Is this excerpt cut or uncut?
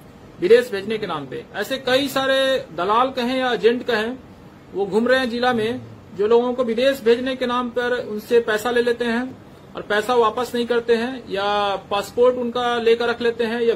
uncut